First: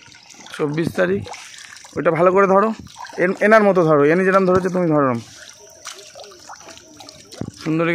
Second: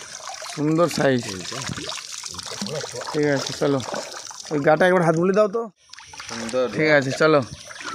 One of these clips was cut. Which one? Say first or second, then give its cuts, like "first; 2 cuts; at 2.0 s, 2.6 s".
second; 1 cut; at 5.5 s